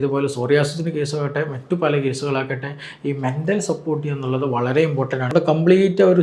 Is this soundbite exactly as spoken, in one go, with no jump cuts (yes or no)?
no